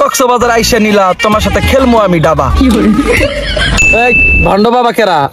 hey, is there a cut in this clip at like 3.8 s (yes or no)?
yes